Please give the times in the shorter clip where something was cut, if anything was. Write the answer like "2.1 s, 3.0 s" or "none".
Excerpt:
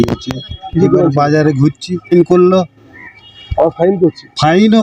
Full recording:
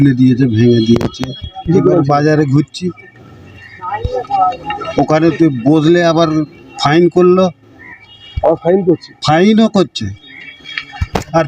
2.1 s